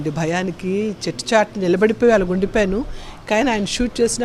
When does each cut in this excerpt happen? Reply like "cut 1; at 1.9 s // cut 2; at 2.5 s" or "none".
none